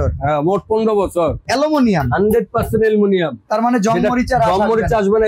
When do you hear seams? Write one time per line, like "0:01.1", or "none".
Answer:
0:01.4